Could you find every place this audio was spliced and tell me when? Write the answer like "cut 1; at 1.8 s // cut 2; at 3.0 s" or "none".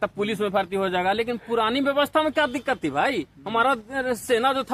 none